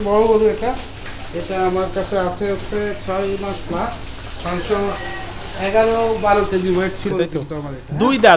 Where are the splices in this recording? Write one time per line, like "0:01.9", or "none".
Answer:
none